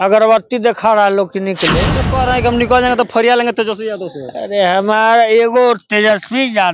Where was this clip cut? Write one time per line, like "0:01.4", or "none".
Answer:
0:02.1